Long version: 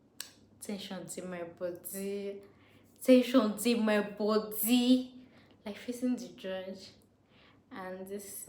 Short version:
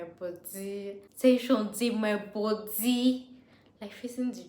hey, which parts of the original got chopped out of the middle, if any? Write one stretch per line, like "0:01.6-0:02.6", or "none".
0:02.5-0:02.9